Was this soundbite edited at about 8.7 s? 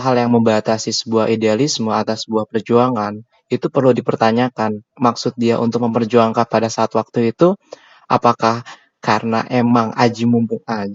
no; 0 cuts

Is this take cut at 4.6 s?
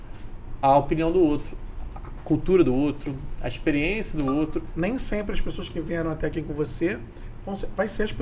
yes; 1 cut; at 4.6 s

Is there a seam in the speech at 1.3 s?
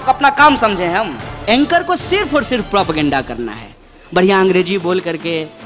yes; 1 cut; at 1.3 s

